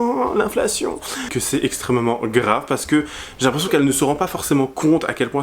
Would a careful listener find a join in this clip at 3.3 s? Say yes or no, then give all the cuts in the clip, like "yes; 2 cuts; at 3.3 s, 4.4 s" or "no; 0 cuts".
no; 1 cut; at 1.3 s